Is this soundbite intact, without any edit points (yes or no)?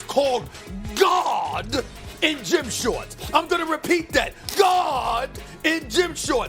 no